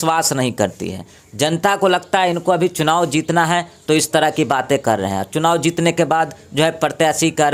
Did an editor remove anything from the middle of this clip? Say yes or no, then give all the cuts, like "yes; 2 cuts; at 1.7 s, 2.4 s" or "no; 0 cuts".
no; 0 cuts